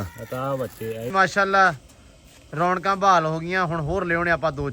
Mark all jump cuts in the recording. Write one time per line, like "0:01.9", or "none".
0:01.1